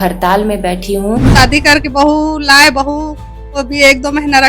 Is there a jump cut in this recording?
yes; 1 cut; at 1.3 s

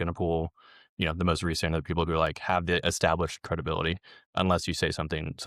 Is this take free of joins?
yes; 0 cuts

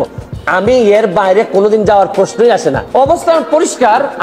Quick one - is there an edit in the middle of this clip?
yes; 1 cut; at 2.8 s

